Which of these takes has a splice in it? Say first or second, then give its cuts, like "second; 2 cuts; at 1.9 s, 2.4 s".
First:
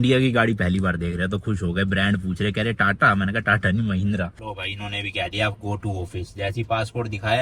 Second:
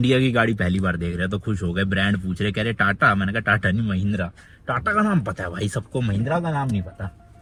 first; 1 cut; at 4.5 s